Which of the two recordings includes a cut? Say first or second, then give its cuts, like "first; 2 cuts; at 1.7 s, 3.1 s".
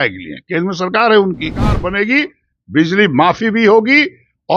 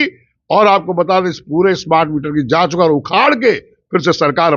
first; 1 cut; at 1.8 s